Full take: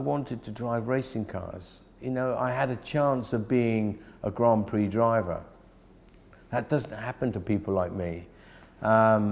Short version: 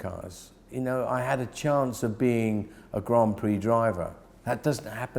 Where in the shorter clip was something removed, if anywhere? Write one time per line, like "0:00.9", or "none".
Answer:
0:04.3